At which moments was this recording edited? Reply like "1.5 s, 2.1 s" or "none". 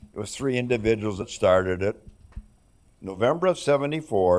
1.2 s, 3.0 s